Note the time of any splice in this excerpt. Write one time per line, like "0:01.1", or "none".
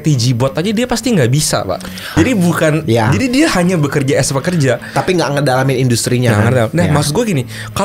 0:02.1